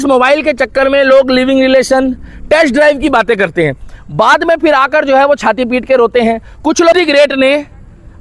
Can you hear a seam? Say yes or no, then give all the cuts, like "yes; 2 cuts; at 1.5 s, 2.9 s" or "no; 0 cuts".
yes; 1 cut; at 6.9 s